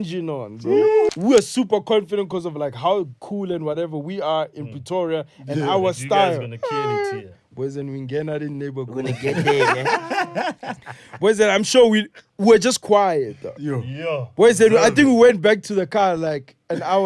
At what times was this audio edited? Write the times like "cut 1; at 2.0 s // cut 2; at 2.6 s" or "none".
cut 1; at 1.1 s